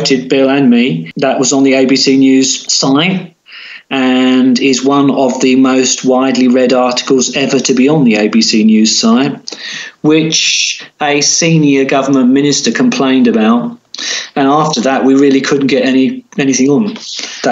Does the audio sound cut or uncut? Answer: cut